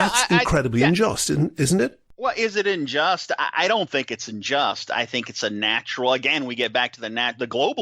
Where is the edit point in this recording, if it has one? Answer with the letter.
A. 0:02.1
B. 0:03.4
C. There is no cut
A